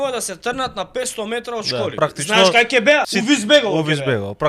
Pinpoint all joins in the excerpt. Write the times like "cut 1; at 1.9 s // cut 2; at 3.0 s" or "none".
cut 1; at 1.9 s // cut 2; at 3.1 s